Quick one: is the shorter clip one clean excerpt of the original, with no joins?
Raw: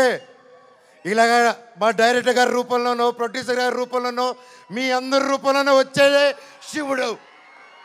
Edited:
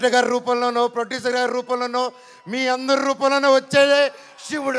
yes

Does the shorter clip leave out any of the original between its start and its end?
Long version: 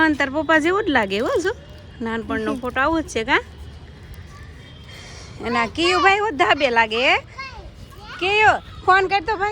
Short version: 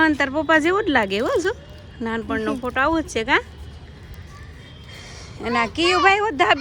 no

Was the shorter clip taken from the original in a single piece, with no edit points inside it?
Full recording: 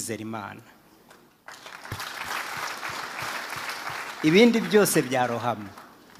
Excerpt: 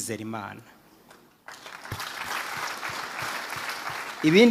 yes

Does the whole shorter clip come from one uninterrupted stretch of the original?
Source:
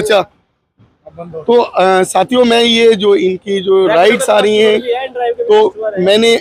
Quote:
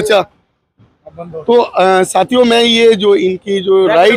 yes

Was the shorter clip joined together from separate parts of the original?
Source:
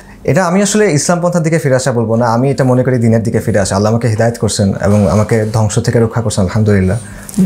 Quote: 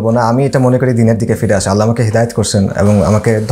no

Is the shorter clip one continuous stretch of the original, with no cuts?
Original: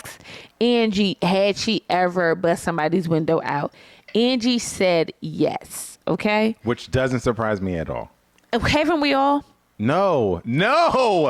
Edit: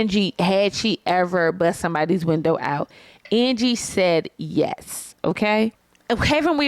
no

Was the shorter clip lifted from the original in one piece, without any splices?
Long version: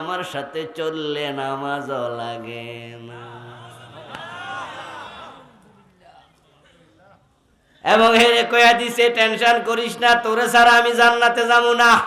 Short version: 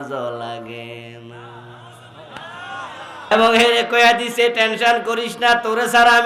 no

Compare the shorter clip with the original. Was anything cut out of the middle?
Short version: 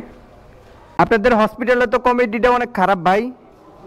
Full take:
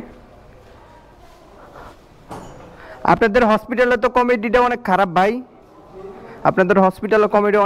yes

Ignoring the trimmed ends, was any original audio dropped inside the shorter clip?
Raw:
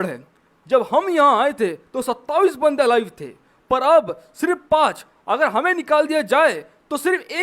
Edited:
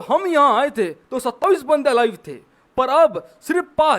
yes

